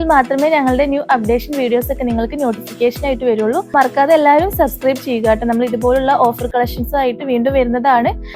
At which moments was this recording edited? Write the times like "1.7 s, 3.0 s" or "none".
3.7 s

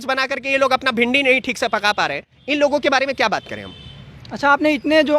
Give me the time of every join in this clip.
none

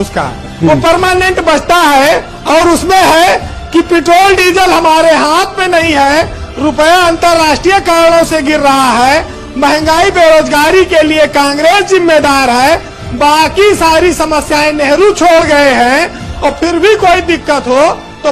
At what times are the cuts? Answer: none

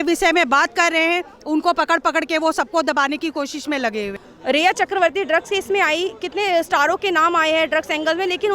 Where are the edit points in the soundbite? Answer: 4.2 s

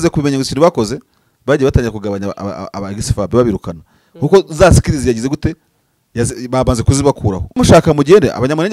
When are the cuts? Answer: 7.6 s

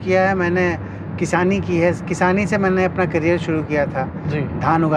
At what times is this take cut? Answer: none

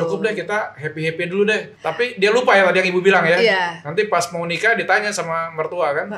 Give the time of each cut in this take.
1.8 s

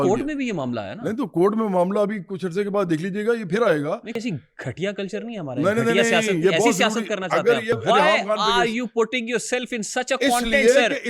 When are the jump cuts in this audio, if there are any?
4.2 s, 7.8 s

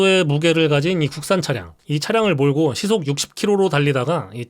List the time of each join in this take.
1.8 s

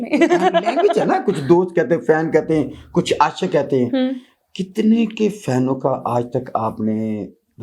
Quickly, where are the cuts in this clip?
none

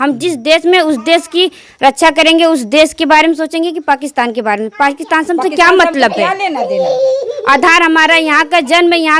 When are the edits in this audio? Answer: none

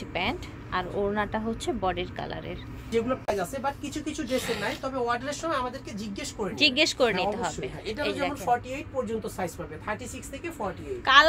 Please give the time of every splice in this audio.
3.2 s

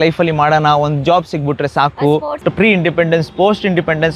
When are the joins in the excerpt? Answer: 2.2 s

